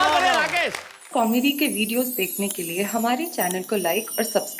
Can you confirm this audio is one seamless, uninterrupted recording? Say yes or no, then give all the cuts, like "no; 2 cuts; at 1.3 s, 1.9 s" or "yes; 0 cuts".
no; 1 cut; at 1.0 s